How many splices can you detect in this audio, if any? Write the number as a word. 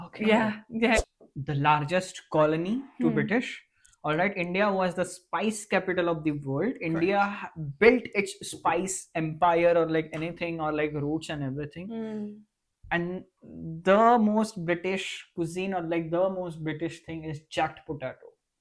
one